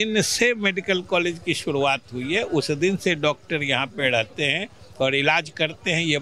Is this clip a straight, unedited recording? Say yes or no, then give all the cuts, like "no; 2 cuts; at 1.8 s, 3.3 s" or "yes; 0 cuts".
yes; 0 cuts